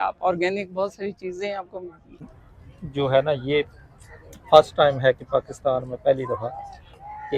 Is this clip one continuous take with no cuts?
no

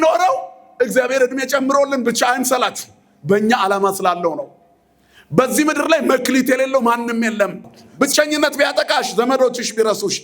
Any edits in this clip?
yes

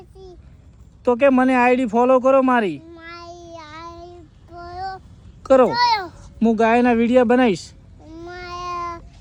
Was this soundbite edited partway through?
no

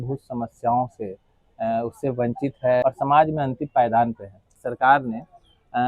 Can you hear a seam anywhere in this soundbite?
yes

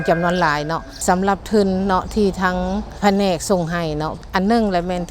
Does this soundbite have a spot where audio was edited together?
yes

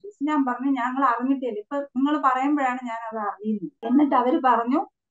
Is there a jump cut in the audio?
yes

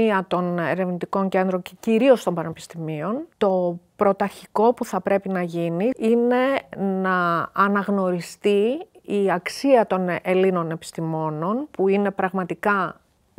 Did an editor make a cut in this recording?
no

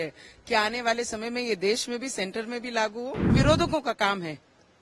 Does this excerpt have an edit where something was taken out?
yes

